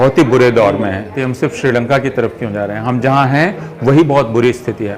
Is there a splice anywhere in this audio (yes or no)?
yes